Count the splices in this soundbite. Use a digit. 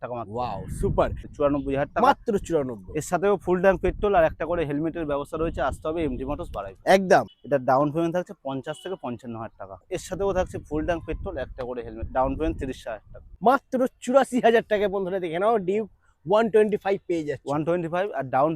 4